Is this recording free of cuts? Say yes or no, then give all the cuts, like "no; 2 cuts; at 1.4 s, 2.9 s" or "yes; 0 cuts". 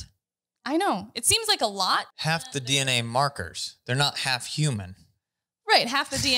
no; 1 cut; at 2.1 s